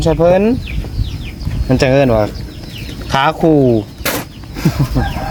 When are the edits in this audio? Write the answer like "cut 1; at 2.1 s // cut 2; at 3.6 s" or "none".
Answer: none